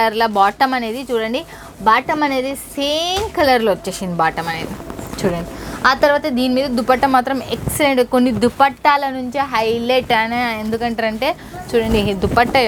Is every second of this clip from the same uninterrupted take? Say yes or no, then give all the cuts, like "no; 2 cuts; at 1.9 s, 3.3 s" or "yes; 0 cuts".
yes; 0 cuts